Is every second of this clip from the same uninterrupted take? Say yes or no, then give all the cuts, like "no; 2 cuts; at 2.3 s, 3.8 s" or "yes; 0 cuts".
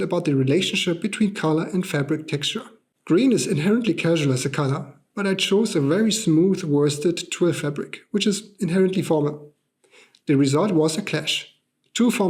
yes; 0 cuts